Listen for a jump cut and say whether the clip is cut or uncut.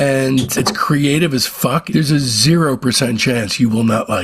cut